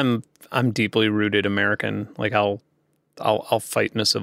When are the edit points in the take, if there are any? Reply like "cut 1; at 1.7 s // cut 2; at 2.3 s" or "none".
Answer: none